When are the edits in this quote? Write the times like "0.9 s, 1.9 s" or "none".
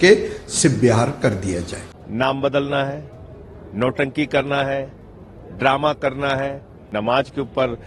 1.7 s, 6.9 s